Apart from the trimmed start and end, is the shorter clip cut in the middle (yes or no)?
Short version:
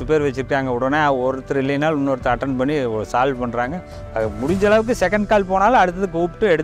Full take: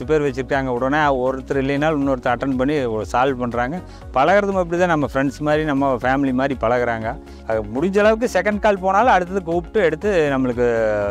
yes